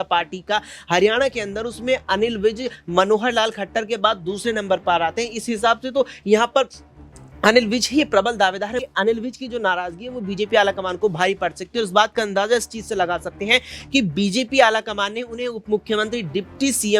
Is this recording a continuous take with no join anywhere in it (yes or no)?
no